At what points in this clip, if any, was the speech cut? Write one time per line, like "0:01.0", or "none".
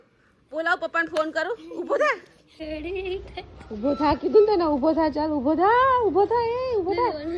none